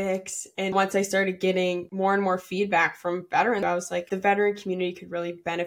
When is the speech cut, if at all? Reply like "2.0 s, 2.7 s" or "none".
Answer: 0.7 s, 1.9 s, 4.0 s